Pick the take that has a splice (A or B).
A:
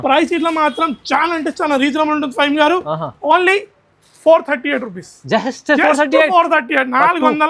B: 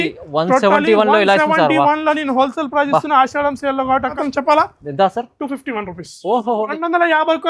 B